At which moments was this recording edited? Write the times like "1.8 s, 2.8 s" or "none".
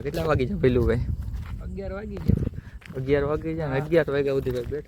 none